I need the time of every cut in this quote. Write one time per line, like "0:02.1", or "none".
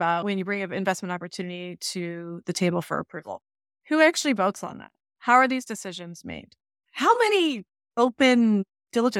none